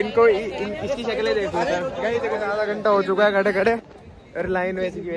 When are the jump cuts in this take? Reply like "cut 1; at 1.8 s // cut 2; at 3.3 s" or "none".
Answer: none